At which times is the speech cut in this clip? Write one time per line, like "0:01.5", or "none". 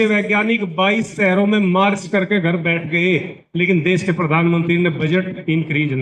none